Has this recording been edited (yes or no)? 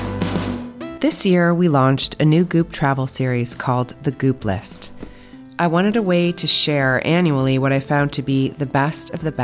yes